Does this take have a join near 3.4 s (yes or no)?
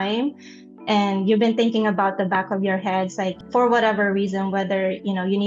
yes